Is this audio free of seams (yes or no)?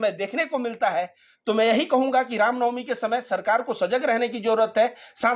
yes